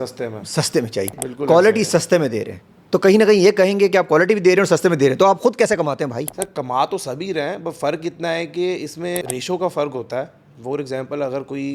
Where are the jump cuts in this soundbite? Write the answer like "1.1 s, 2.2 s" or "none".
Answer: 1.1 s, 9.2 s